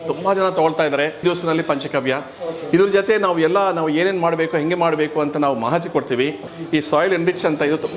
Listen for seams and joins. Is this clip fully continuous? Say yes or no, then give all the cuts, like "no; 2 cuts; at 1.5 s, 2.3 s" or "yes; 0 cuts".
no; 2 cuts; at 1.2 s, 6.5 s